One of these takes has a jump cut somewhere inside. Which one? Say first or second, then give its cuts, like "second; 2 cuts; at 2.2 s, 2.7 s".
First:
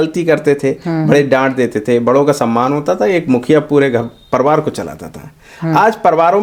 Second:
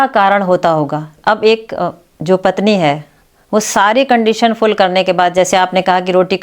second; 1 cut; at 1.1 s